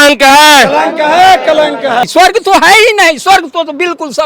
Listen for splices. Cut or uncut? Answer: cut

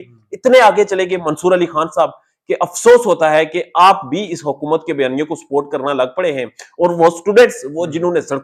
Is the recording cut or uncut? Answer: uncut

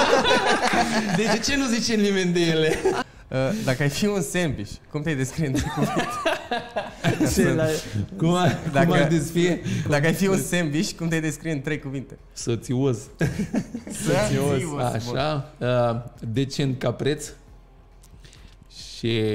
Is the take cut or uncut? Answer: cut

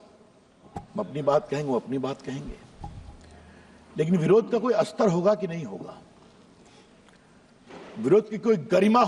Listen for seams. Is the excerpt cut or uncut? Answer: uncut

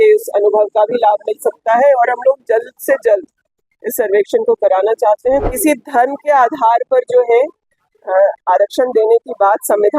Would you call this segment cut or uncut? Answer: cut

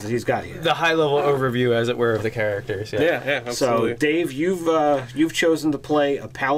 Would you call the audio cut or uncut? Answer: cut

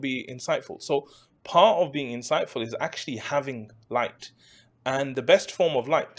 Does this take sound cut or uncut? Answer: uncut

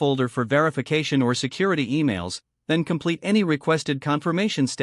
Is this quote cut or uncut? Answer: uncut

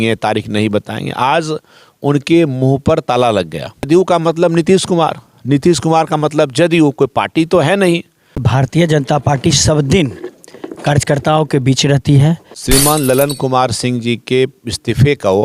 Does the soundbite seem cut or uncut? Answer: cut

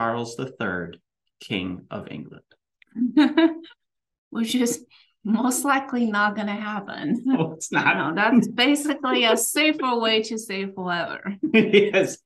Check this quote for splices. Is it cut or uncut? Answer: uncut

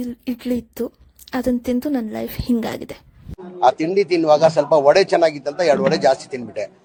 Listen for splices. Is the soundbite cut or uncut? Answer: uncut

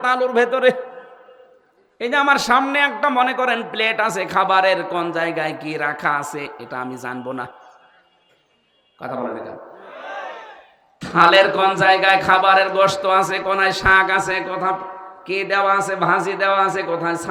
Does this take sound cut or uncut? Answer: uncut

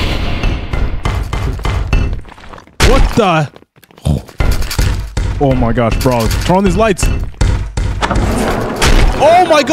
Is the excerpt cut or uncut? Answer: uncut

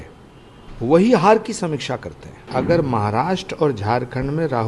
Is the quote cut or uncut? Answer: cut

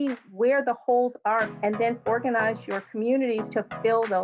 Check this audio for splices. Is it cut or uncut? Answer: cut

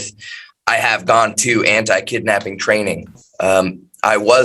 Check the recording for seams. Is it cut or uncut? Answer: uncut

